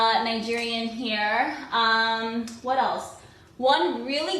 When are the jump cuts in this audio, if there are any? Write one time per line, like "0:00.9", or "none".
0:02.5